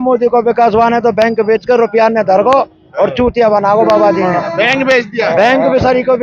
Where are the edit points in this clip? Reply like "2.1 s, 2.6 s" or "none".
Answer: none